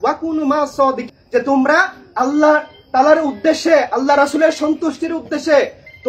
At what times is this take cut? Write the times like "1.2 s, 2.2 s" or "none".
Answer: 1.1 s